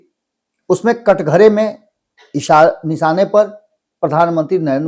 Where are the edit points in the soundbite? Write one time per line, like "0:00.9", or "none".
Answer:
none